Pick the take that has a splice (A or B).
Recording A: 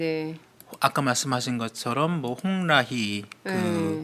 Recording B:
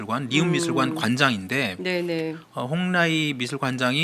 A